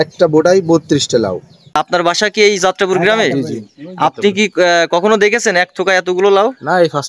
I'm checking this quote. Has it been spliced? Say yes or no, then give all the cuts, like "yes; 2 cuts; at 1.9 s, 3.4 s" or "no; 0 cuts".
yes; 1 cut; at 1.6 s